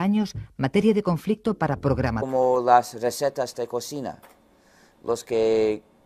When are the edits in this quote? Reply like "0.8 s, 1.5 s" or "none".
none